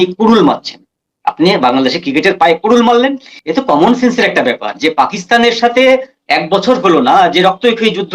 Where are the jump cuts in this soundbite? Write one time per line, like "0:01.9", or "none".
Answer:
0:03.3